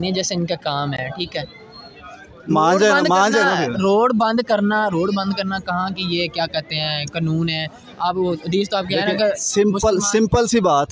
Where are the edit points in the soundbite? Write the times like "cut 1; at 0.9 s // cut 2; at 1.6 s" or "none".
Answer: none